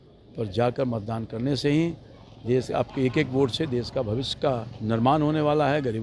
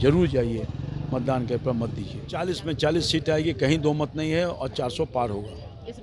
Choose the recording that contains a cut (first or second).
second